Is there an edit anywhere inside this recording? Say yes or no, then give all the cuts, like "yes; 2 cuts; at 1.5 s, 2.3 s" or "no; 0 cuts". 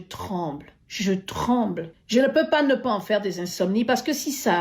yes; 1 cut; at 1.9 s